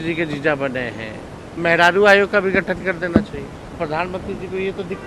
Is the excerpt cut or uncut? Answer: cut